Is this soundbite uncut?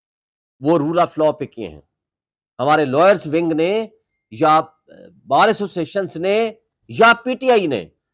yes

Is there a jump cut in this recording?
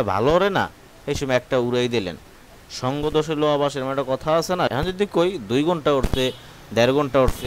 yes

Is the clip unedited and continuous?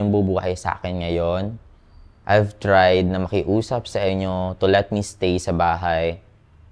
yes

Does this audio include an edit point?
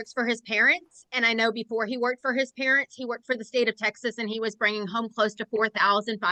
no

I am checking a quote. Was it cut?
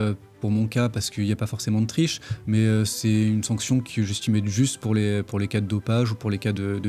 no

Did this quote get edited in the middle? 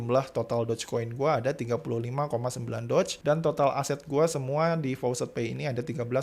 no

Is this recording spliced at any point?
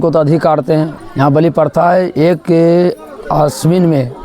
yes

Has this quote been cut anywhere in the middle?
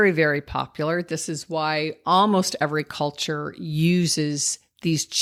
no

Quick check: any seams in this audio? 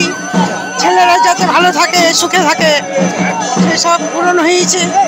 no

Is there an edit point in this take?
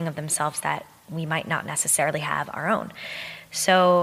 no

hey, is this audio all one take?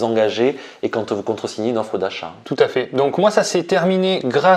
no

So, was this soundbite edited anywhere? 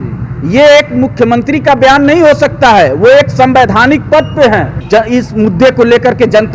yes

